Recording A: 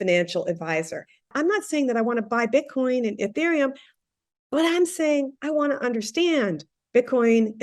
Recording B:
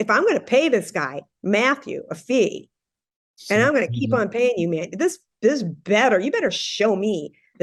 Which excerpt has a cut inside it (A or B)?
A